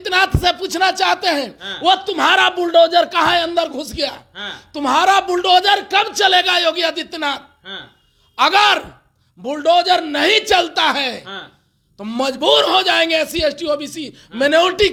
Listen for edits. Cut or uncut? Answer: uncut